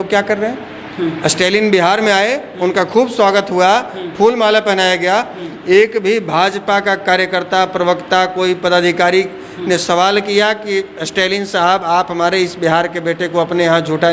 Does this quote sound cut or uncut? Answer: uncut